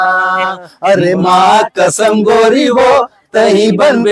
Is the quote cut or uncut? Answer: uncut